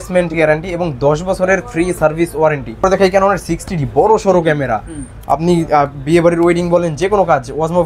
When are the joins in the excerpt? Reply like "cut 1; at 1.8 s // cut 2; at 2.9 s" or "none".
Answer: cut 1; at 2.8 s